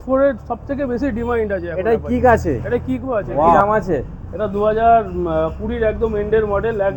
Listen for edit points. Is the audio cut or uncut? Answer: cut